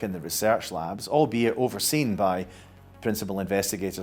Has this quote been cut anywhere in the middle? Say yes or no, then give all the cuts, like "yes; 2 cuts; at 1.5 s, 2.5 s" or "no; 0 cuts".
no; 0 cuts